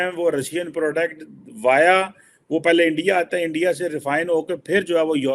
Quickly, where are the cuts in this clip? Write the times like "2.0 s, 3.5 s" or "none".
none